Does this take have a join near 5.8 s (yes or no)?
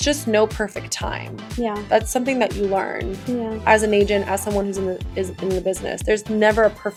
no